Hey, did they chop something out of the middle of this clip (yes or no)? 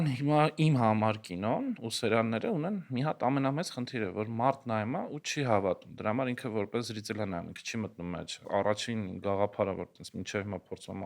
yes